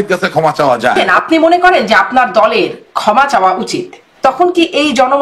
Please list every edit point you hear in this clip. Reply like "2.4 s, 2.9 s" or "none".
0.9 s, 4.0 s